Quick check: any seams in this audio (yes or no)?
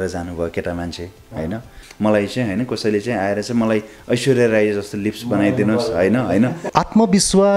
yes